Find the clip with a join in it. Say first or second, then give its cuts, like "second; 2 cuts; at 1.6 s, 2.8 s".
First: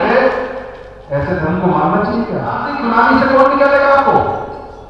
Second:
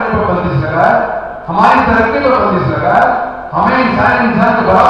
first; 1 cut; at 2.7 s